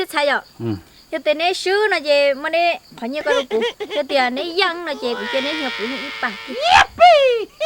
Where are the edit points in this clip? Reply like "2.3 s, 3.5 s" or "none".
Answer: 6.6 s